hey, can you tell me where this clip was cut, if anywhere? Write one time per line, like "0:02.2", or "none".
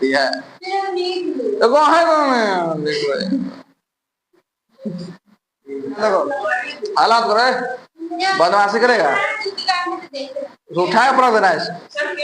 0:06.0